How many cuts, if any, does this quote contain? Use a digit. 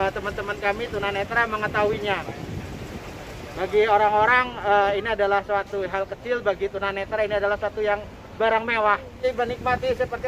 1